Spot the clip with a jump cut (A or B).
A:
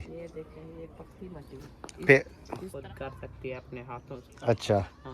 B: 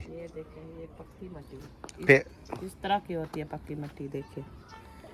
A